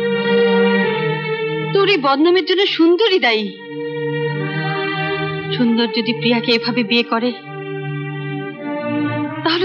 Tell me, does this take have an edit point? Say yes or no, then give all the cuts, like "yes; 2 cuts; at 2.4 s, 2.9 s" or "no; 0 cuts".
no; 0 cuts